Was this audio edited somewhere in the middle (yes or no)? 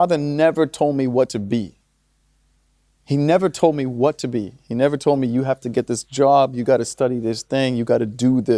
no